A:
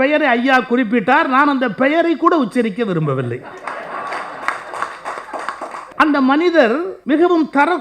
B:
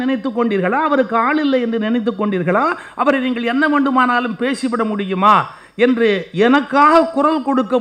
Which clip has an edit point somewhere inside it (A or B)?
A